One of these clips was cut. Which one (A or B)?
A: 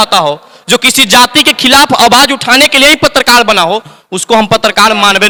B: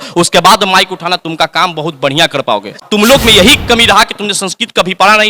B